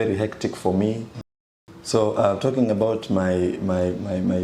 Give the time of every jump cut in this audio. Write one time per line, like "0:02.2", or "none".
0:01.1